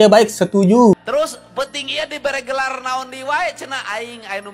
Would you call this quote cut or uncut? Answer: cut